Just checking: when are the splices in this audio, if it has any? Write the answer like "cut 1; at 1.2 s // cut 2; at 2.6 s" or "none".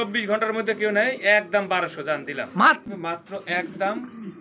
cut 1; at 2.8 s